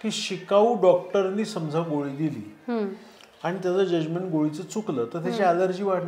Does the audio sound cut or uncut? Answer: uncut